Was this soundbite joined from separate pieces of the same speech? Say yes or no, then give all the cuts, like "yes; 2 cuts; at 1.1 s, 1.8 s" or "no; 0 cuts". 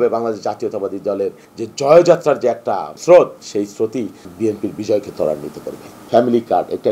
yes; 4 cuts; at 1.5 s, 2.9 s, 4.3 s, 6.1 s